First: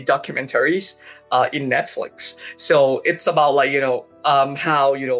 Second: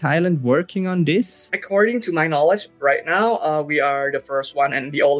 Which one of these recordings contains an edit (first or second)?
second